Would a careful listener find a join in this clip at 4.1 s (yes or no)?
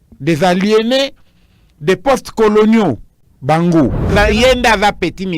yes